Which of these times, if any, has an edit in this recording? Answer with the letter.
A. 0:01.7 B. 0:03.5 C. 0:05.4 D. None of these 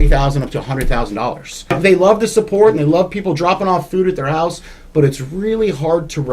A